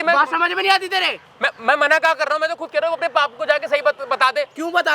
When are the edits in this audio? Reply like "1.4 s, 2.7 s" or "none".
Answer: none